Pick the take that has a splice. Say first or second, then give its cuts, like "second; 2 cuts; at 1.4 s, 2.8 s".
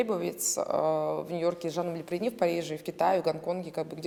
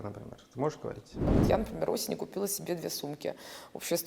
second; 1 cut; at 1.3 s